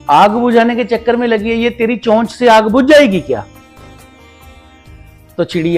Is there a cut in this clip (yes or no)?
no